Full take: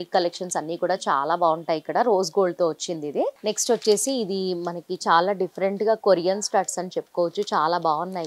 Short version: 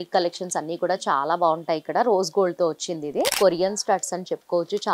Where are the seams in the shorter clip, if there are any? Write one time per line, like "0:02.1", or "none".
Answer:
0:03.3